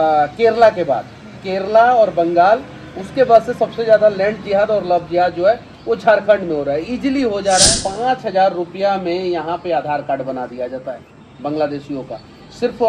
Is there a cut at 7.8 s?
yes; 1 cut; at 7.8 s

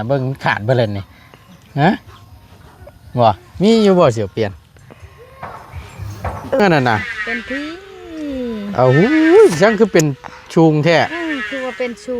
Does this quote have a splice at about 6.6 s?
yes; 1 cut; at 6.6 s

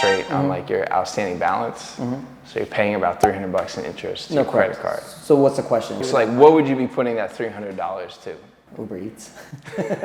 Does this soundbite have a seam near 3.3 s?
no; 2 cuts; at 6.0 s, 8.6 s

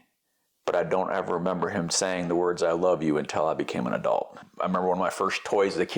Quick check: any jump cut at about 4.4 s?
yes; 1 cut; at 4.4 s

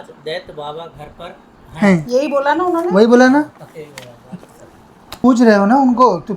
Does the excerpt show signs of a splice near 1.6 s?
no; 1 cut; at 5.0 s

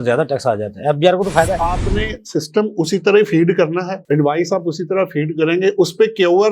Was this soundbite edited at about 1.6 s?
yes; 1 cut; at 1.6 s

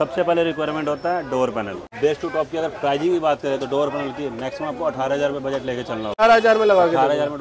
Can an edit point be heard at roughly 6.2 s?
yes; 2 cuts; at 1.9 s, 6.2 s

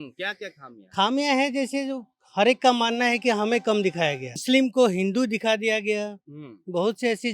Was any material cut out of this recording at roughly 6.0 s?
no; 1 cut; at 4.4 s

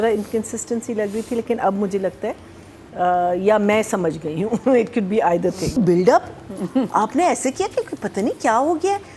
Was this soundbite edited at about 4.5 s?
no; 1 cut; at 5.8 s

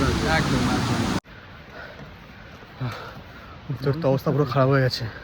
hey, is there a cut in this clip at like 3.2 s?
no; 1 cut; at 1.2 s

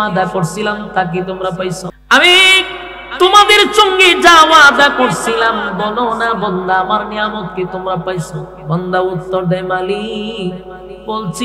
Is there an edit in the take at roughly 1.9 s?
yes; 1 cut; at 1.9 s

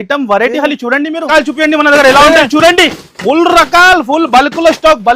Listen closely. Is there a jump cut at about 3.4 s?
no; 1 cut; at 1.3 s

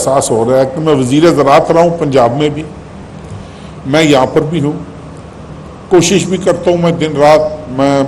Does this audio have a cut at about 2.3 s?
no; 0 cuts

